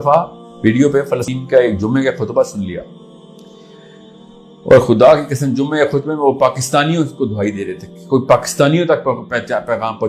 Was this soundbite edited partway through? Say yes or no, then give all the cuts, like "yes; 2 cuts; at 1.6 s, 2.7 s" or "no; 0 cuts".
yes; 1 cut; at 1.3 s